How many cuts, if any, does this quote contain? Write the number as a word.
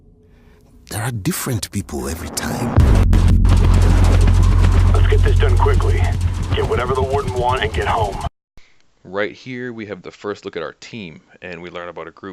zero